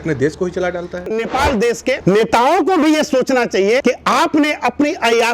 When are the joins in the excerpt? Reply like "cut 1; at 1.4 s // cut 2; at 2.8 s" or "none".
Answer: cut 1; at 1.1 s